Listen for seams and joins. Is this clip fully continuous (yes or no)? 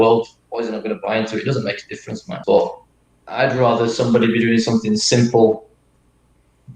no